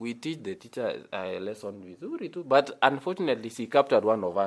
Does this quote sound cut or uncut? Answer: uncut